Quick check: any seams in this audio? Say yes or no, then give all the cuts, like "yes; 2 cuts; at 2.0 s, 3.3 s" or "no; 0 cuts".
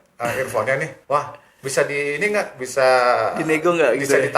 yes; 1 cut; at 0.9 s